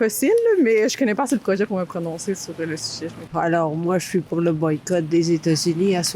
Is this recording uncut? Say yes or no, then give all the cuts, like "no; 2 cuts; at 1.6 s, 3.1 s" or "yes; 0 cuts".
no; 1 cut; at 3.2 s